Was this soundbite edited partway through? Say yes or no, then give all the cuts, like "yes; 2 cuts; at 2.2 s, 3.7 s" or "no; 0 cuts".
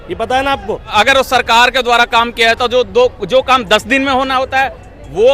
yes; 1 cut; at 0.9 s